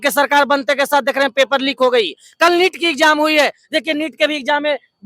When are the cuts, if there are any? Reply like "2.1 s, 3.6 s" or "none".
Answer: none